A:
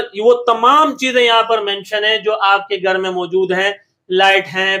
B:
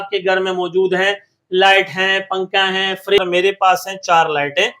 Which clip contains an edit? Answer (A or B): B